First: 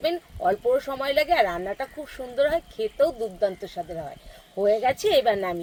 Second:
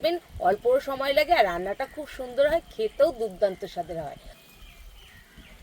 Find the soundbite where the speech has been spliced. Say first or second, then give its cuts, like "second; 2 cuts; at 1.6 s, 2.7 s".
second; 1 cut; at 4.3 s